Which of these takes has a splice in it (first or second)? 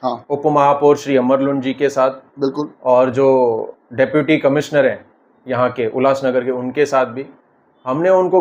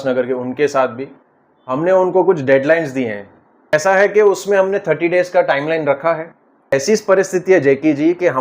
second